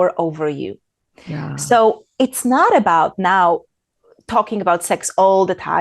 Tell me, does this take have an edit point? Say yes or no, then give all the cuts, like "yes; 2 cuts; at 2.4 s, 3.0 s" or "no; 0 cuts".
no; 0 cuts